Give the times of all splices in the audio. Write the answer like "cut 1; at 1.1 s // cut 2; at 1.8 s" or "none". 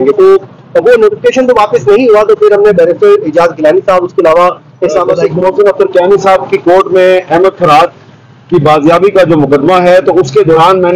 cut 1; at 5.1 s